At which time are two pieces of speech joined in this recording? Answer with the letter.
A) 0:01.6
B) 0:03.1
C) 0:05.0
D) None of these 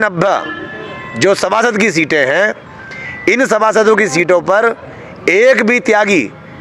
D